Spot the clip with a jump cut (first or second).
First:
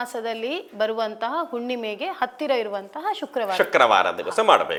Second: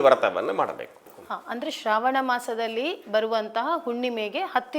second